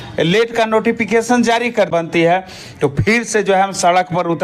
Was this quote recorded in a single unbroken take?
no; 1 cut; at 1.9 s

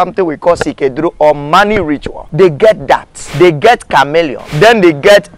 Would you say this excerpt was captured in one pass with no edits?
no; 3 cuts; at 2.2 s, 3.2 s, 4.4 s

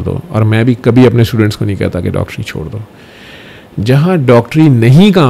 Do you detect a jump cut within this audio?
no; 0 cuts

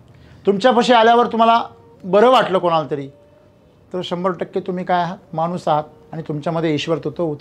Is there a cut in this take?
no; 0 cuts

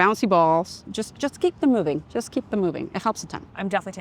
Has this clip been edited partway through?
yes; 1 cut; at 2.1 s

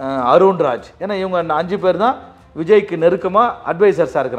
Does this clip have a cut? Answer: yes; 1 cut; at 0.9 s

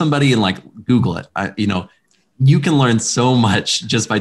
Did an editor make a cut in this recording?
no; 0 cuts

